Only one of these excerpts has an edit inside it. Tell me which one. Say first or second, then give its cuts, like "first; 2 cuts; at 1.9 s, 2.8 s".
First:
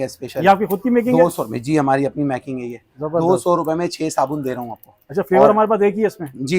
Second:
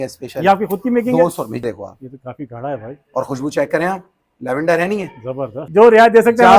second; 2 cuts; at 1.6 s, 5.6 s